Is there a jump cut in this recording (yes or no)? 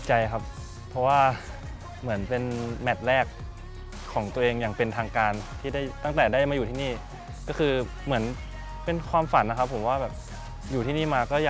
no